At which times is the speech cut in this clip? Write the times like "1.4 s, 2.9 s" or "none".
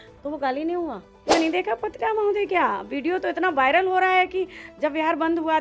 1.3 s